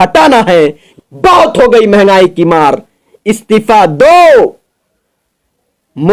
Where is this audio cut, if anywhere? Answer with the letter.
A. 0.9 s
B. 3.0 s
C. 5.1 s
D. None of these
A